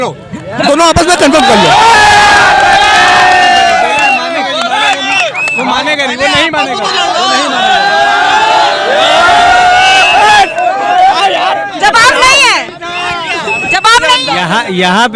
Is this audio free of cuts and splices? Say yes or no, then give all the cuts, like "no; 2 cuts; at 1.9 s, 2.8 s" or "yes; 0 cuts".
yes; 0 cuts